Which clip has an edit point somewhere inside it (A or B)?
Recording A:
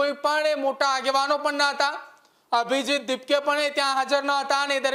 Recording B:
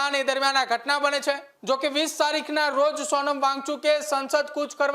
B